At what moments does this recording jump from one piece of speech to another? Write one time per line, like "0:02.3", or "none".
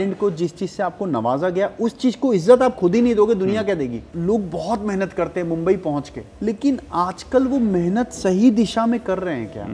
0:04.0
0:06.2